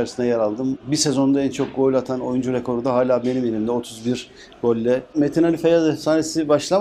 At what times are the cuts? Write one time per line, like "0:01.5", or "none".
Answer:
0:00.8
0:05.1